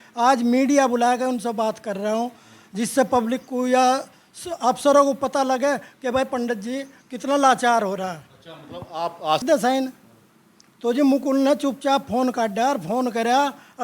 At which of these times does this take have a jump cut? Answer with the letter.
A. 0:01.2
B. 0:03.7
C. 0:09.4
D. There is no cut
C